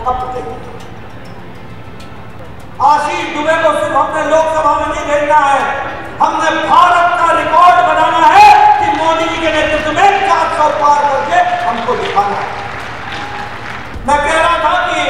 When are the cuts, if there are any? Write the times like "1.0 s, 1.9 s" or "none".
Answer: 2.4 s, 13.9 s